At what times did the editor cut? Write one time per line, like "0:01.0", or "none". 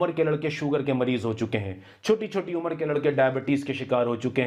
none